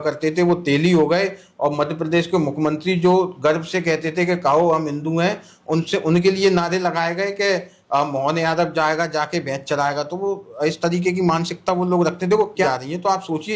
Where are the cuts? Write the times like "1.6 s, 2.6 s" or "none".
12.6 s